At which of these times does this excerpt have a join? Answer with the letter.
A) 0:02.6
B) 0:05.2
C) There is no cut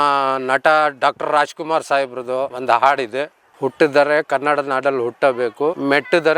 A